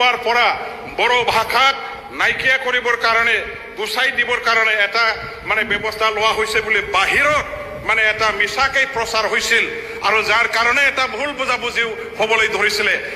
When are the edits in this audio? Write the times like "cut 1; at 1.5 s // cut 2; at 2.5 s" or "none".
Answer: none